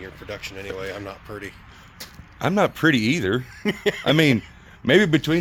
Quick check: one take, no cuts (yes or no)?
yes